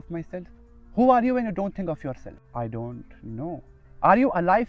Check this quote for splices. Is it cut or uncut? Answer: cut